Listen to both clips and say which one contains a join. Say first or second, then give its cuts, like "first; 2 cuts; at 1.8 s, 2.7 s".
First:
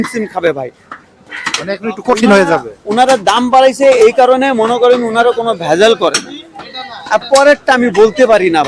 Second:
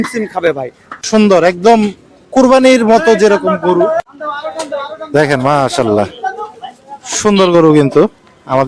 second; 1 cut; at 0.9 s